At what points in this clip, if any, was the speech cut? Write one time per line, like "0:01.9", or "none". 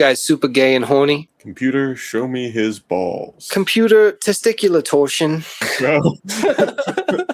0:01.4
0:05.7